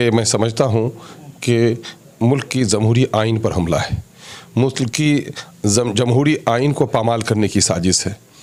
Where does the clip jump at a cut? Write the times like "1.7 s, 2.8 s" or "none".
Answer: none